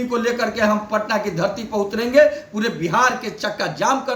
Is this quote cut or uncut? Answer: uncut